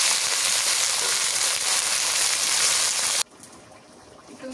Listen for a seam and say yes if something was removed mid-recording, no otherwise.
yes